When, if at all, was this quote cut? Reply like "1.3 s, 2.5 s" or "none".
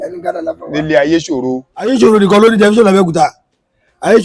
1.9 s